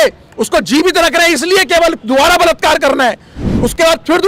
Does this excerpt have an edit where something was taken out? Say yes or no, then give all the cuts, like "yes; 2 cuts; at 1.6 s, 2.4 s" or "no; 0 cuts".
no; 0 cuts